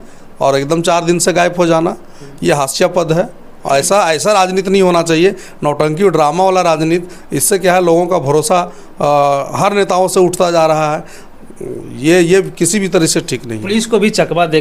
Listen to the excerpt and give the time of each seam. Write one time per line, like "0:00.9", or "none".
none